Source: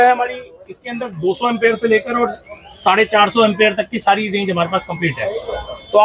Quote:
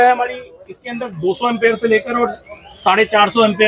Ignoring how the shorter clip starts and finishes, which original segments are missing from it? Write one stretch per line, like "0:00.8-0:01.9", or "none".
none